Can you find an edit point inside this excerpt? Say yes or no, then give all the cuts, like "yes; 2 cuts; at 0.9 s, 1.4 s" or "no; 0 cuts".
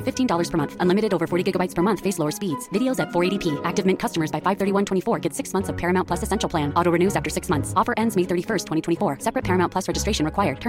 no; 0 cuts